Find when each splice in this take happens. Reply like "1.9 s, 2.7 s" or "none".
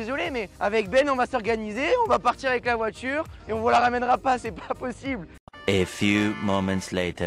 none